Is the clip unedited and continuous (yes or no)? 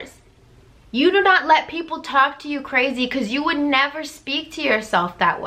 yes